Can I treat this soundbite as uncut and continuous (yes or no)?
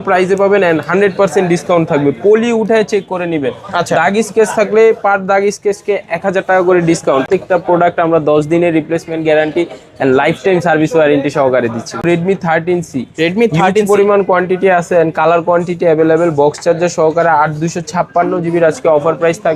no